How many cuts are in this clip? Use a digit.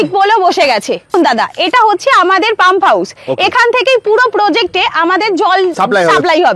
2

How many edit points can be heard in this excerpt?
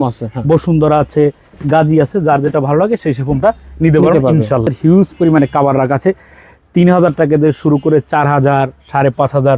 1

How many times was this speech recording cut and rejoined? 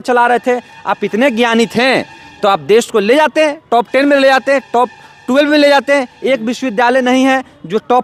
0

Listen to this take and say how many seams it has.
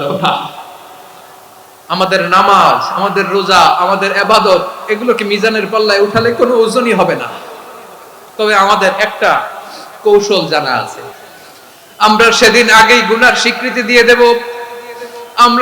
1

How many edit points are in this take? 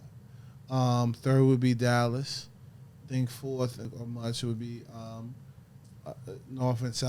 1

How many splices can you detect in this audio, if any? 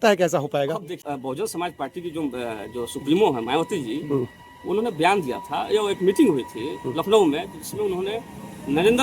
1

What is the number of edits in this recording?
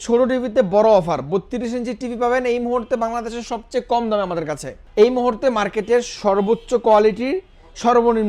1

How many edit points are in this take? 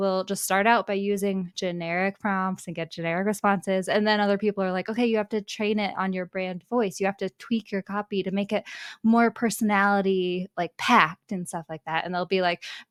0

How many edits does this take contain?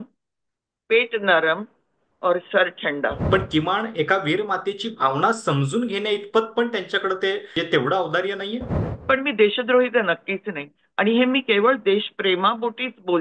3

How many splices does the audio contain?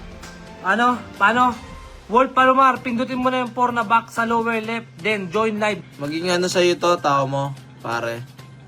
1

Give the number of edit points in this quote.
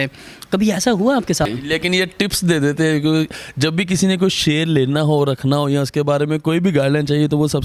1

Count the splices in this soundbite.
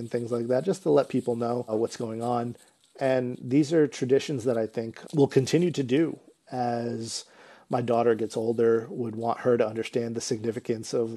0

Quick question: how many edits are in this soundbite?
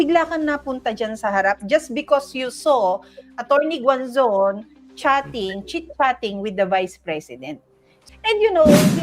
1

